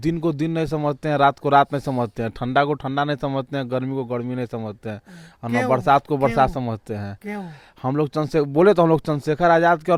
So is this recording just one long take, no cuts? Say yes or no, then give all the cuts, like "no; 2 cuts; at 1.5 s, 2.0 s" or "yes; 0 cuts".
yes; 0 cuts